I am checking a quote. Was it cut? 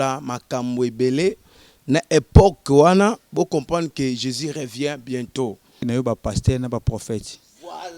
yes; 1 cut; at 5.8 s

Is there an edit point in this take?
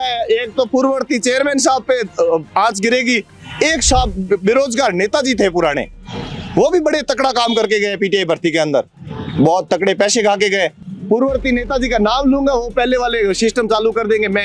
no; 0 cuts

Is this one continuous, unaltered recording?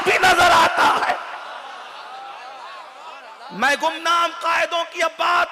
yes; 0 cuts

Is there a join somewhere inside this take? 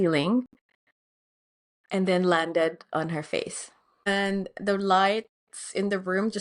yes; 1 cut; at 4.1 s

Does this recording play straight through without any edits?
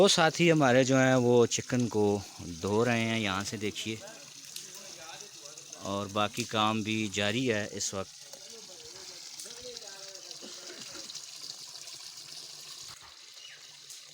no; 1 cut; at 12.9 s

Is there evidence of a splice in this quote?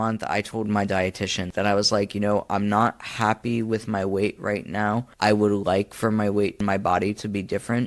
yes; 3 cuts; at 1.5 s, 5.1 s, 6.6 s

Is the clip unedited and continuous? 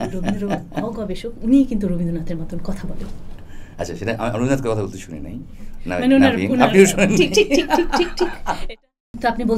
no; 1 cut; at 8.6 s

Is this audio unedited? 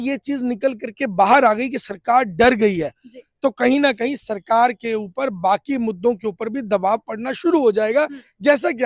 yes; 0 cuts

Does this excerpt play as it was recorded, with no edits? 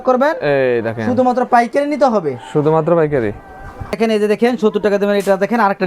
yes; 0 cuts

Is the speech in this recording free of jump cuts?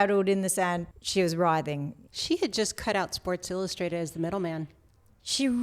no; 2 cuts; at 0.8 s, 2.0 s

